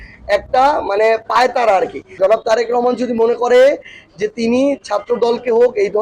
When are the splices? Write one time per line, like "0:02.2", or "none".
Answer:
0:02.0